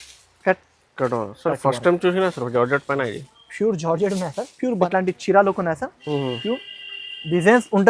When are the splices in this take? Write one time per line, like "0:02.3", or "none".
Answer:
0:04.9